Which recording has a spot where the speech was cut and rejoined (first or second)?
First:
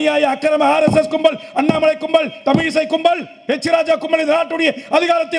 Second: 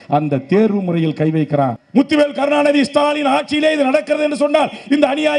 second